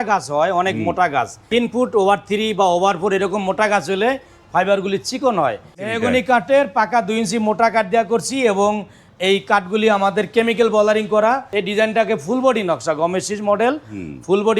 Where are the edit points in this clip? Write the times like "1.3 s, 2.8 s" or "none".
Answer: 1.4 s, 5.9 s, 11.5 s